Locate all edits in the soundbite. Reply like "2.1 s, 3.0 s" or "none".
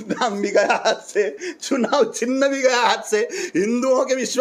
none